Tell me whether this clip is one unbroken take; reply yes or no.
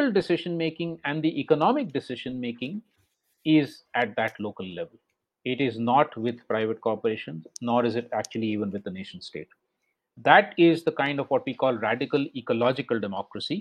no